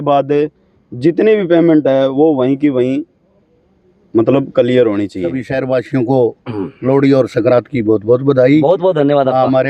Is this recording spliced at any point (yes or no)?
yes